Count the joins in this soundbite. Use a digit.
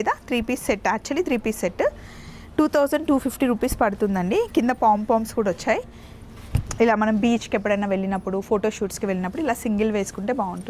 0